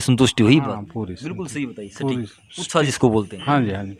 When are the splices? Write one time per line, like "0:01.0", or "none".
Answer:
none